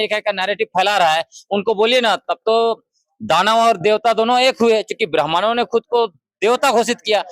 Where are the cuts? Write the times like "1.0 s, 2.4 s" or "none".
none

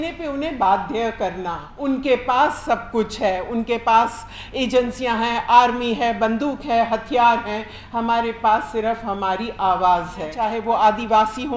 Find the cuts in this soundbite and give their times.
1.7 s, 10.5 s

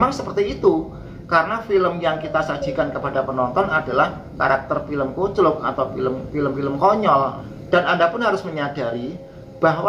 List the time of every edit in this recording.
none

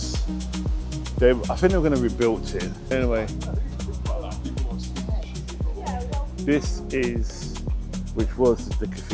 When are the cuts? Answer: 2.8 s

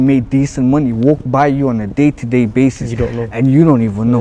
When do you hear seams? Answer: none

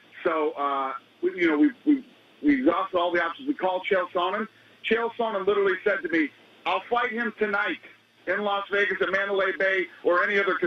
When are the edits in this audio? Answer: none

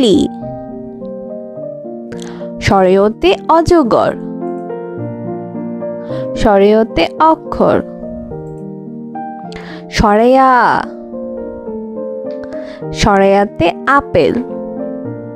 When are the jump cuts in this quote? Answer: 10.9 s, 12.7 s, 14.5 s

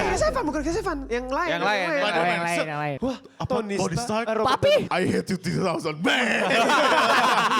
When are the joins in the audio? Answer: 4.9 s

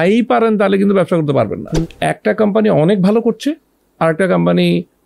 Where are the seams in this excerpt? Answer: 1.8 s

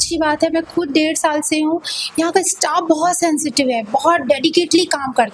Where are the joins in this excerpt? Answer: none

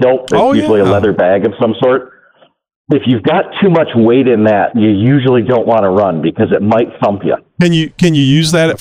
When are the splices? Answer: none

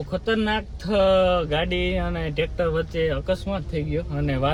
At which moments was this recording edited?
none

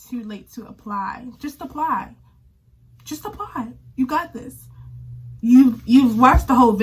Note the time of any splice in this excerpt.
none

